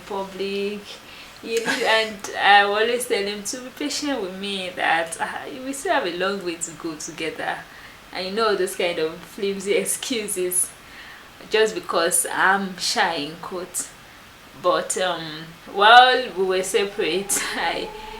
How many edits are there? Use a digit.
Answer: 1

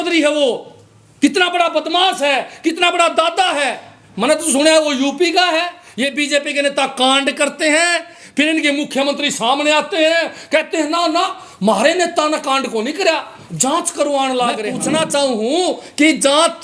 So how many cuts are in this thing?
2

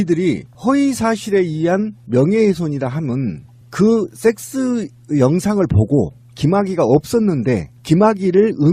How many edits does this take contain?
0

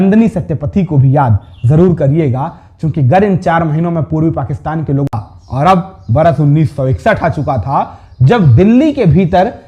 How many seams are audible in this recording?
1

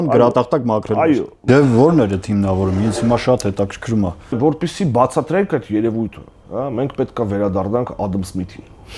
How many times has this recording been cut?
2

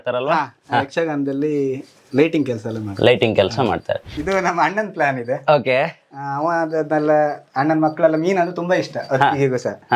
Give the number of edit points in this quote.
1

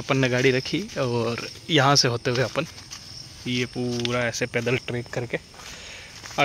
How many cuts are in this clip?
0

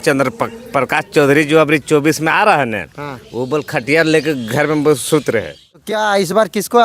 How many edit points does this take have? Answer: 1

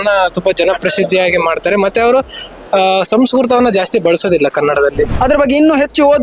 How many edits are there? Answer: 1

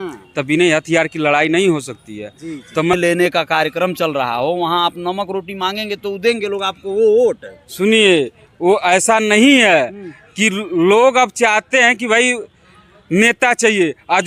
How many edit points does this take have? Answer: 1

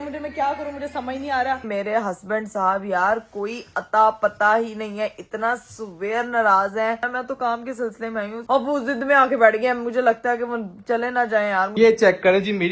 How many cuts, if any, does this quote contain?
4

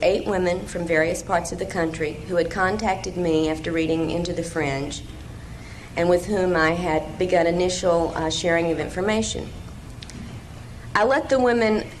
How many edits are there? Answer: 0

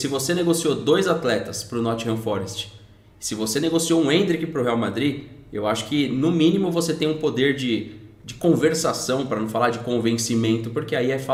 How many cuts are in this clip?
0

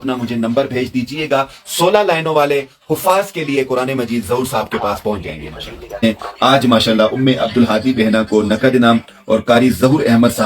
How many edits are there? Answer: 1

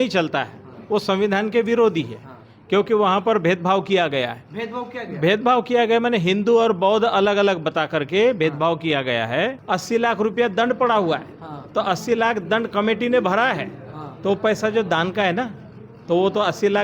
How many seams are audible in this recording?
1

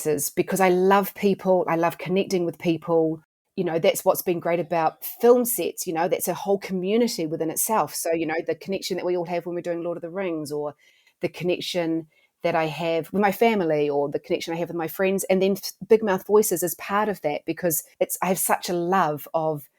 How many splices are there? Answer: 1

